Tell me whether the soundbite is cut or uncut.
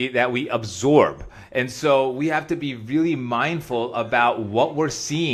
uncut